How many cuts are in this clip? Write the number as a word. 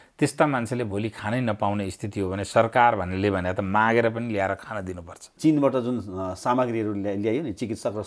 one